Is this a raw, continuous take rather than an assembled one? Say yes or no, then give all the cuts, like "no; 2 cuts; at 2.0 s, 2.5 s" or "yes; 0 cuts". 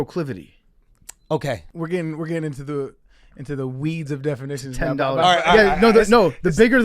no; 1 cut; at 1.7 s